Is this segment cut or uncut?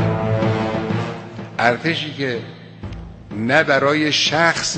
cut